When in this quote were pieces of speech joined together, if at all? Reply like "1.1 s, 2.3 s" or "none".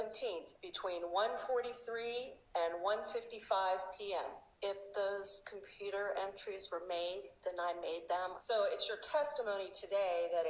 none